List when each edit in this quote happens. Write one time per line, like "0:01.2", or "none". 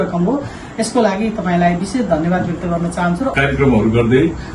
0:03.3